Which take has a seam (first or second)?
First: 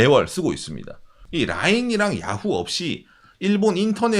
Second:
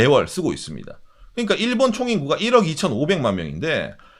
first